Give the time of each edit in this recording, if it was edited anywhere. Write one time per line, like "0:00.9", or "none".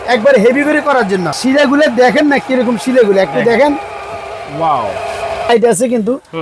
0:01.4
0:05.5